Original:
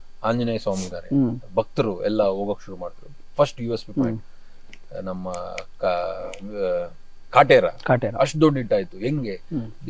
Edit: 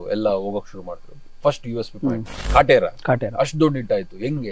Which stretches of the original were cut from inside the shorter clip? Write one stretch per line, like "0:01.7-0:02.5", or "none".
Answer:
0:04.3-0:07.1